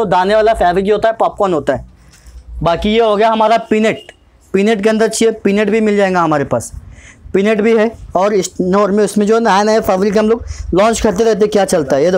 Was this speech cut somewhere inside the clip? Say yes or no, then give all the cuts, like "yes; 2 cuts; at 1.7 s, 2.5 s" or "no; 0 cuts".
no; 0 cuts